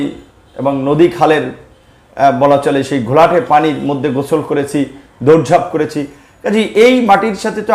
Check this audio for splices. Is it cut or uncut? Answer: uncut